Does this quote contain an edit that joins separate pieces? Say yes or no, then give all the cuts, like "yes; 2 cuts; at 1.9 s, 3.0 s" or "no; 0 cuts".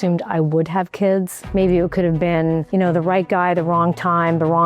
yes; 2 cuts; at 1.4 s, 2.7 s